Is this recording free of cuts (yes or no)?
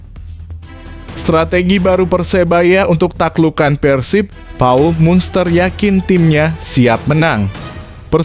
no